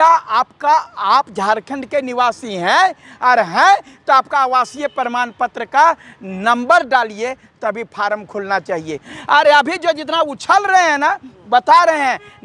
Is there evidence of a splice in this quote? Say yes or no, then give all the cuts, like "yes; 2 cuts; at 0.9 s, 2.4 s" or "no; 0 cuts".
yes; 1 cut; at 9.1 s